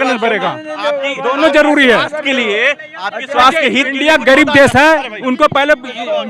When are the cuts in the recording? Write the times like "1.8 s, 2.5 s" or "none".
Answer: none